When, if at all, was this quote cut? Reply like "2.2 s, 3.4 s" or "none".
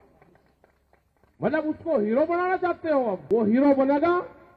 3.2 s